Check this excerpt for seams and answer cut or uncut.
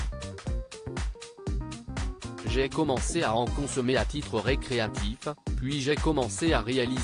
cut